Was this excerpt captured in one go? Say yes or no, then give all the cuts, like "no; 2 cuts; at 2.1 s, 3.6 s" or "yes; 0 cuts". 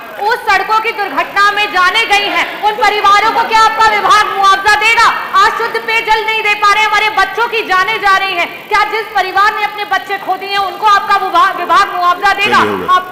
yes; 0 cuts